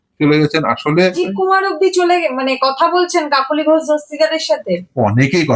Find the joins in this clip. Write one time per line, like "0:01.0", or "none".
0:01.2